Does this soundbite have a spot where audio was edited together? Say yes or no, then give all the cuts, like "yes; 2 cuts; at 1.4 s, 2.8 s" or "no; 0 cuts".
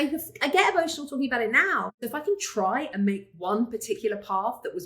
yes; 1 cut; at 2.0 s